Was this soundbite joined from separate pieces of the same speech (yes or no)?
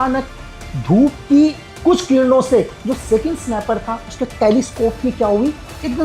yes